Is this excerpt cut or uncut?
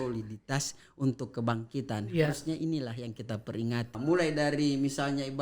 cut